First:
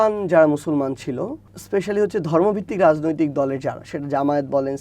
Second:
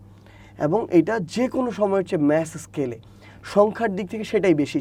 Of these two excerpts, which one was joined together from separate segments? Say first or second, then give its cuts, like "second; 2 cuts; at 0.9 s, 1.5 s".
first; 1 cut; at 1.5 s